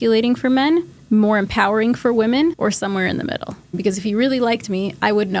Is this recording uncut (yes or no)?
no